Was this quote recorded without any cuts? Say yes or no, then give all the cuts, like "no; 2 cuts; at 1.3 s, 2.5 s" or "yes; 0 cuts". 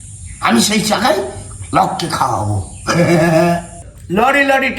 no; 1 cut; at 3.7 s